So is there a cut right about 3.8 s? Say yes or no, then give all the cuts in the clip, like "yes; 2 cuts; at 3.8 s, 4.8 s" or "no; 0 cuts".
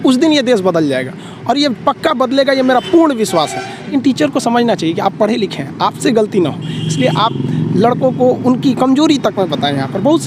yes; 1 cut; at 3.8 s